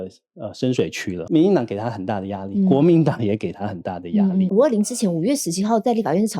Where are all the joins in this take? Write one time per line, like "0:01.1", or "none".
0:01.2
0:04.5